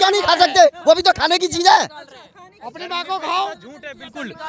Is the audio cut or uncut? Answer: uncut